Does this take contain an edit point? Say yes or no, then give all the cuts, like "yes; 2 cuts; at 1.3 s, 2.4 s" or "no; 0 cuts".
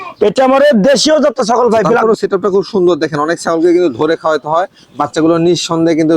yes; 1 cut; at 2.0 s